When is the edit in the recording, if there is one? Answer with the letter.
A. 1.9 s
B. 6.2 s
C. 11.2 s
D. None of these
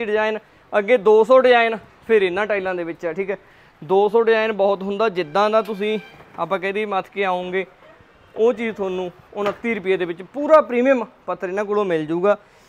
D